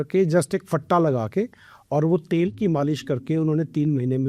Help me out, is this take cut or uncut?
uncut